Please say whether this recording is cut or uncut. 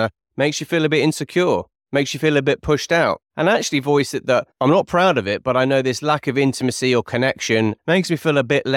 cut